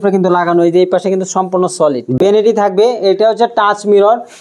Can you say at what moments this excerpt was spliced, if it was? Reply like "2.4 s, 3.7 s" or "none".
2.2 s